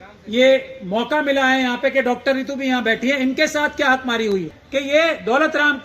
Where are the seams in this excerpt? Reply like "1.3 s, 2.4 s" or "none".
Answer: 4.6 s